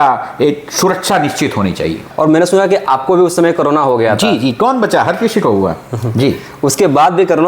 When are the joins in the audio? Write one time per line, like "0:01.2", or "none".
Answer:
0:02.0